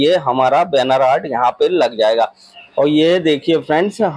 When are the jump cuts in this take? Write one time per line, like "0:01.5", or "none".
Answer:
0:02.4